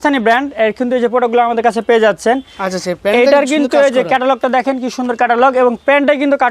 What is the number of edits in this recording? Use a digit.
0